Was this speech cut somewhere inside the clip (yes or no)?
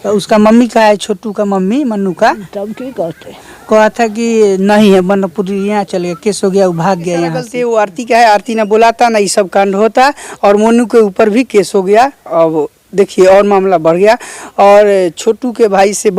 yes